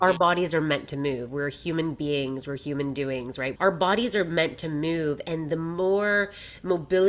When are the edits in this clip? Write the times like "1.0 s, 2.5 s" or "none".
3.5 s